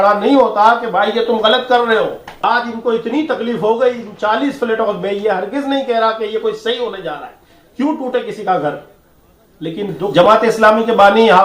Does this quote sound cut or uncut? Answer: cut